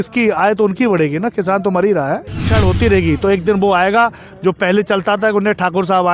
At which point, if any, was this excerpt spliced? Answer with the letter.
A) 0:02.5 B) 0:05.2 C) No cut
A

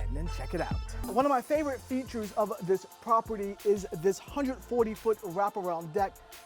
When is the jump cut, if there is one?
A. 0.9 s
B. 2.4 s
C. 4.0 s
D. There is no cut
A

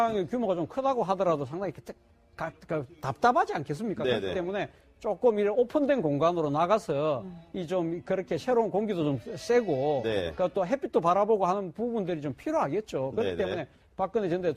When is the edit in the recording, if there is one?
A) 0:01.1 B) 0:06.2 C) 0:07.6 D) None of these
B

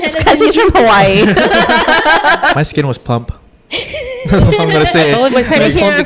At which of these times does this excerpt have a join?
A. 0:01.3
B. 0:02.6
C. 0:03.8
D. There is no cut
B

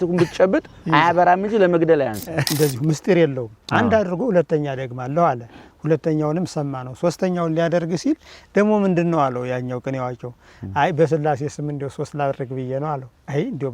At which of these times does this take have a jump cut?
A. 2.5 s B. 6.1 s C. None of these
A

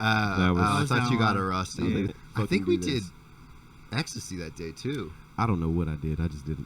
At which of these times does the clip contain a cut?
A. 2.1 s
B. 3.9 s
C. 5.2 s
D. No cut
A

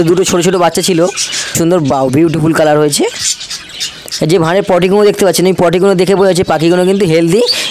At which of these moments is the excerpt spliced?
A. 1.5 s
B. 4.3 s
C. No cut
A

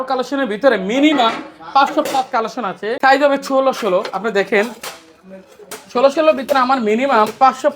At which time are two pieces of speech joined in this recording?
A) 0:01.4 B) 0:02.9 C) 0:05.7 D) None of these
B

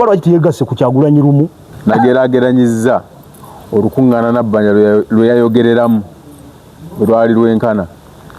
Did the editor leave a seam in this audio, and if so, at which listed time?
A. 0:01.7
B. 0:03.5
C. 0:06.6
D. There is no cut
A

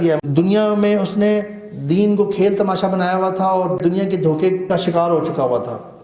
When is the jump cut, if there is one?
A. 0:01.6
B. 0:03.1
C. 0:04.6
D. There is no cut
C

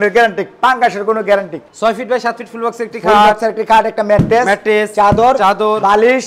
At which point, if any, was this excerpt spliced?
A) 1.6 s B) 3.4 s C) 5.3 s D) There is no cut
A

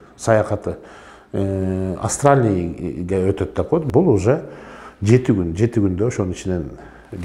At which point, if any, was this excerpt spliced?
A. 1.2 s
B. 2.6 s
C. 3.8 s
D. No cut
C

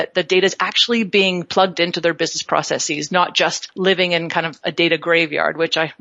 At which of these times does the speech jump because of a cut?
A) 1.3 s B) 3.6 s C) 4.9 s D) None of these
B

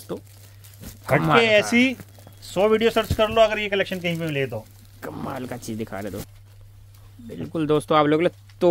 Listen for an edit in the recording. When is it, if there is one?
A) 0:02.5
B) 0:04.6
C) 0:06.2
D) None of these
C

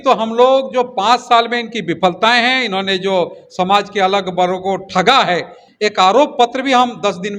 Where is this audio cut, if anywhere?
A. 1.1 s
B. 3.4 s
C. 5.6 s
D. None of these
C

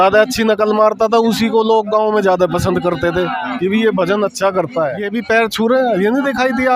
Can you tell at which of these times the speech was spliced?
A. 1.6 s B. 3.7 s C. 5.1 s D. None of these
C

